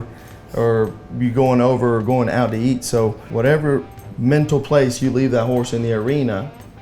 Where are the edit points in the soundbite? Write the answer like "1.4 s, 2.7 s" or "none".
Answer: 3.2 s, 4.0 s

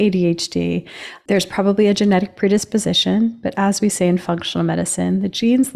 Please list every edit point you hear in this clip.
1.1 s

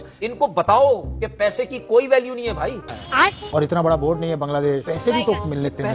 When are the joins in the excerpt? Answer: none

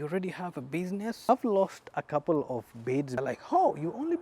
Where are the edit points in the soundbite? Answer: 1.3 s, 3.2 s

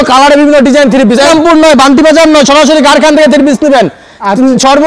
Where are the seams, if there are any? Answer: 1.3 s

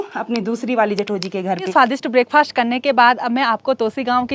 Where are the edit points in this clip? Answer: 1.7 s

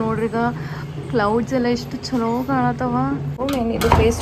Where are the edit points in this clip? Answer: 3.3 s

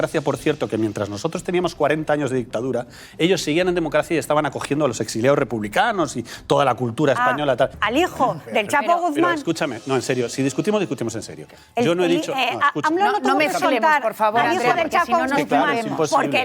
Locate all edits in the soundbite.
7.7 s

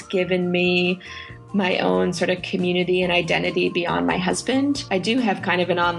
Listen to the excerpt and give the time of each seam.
4.8 s

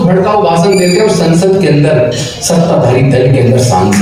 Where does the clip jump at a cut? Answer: none

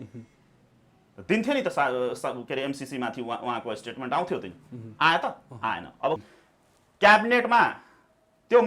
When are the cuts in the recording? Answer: 6.2 s

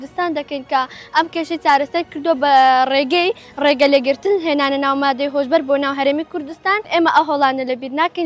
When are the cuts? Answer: 6.9 s

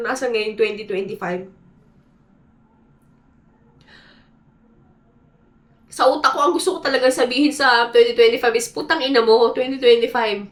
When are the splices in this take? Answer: none

